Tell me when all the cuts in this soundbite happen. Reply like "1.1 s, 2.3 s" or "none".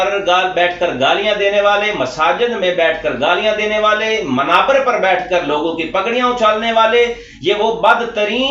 none